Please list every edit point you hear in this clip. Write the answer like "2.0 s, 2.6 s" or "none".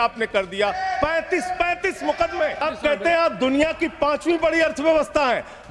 2.6 s